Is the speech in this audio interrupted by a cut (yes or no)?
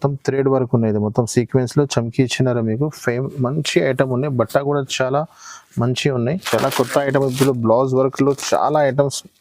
yes